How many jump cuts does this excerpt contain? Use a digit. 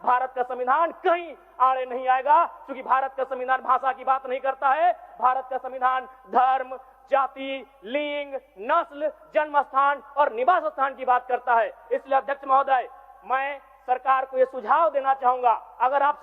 0